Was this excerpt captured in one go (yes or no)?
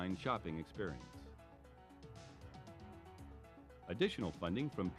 no